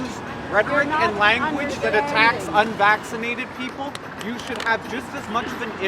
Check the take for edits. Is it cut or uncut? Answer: uncut